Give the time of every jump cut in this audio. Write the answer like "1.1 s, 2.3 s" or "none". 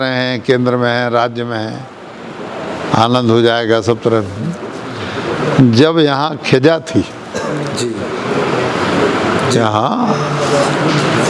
none